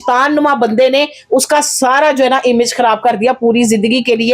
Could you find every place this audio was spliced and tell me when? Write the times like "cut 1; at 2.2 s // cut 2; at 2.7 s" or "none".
none